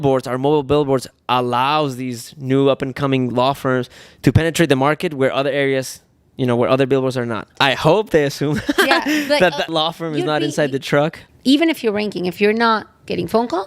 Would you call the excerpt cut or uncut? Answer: cut